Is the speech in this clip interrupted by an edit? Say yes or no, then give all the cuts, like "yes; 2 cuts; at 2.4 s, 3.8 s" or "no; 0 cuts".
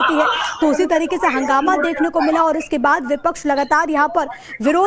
no; 0 cuts